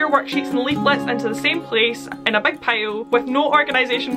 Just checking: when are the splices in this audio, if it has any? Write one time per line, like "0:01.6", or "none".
none